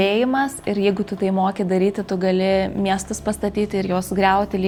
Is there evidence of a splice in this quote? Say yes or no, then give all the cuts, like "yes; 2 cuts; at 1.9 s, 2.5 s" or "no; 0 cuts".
no; 0 cuts